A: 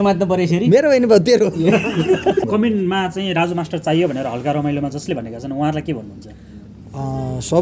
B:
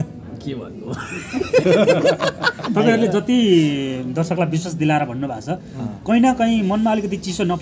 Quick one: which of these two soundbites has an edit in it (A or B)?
A